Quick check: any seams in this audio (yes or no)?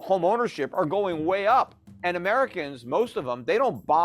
yes